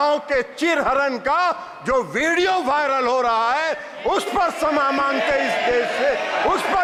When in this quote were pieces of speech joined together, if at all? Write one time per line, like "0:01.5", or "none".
none